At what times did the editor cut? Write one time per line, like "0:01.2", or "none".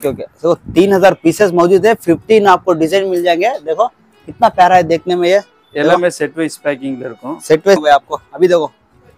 0:07.8